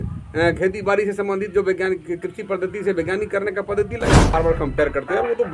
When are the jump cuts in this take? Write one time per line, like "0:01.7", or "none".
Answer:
0:04.3